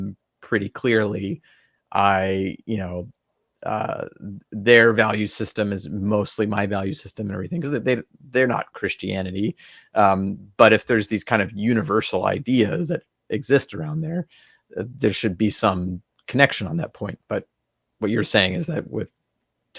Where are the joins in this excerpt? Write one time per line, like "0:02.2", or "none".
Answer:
none